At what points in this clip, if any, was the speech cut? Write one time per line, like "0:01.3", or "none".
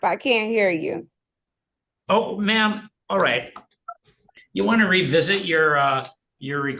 0:04.4